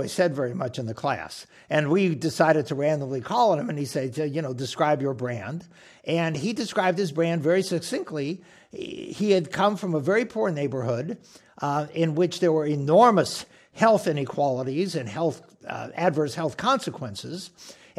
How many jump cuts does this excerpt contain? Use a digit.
0